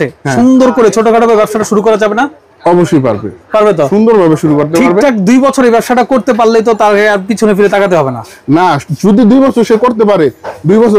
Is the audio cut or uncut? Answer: uncut